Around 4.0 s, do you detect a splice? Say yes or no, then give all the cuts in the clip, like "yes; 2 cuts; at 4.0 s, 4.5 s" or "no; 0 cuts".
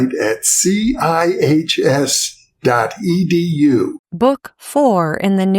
yes; 1 cut; at 4.0 s